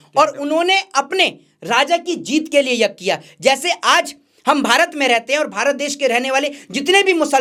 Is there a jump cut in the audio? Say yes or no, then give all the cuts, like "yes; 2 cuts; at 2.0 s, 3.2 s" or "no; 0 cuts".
no; 0 cuts